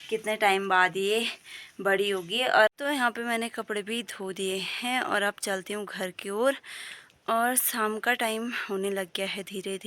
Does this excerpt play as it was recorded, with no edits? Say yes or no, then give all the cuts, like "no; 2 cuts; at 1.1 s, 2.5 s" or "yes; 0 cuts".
no; 1 cut; at 2.7 s